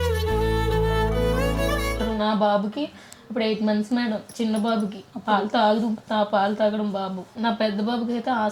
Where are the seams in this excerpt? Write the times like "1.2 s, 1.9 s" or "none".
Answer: 2.1 s, 7.3 s